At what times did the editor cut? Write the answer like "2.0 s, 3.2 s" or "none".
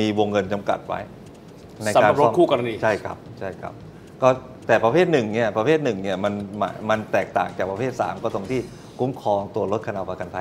none